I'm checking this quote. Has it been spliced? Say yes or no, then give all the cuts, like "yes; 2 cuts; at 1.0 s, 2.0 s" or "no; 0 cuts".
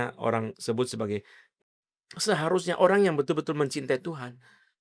yes; 1 cut; at 1.5 s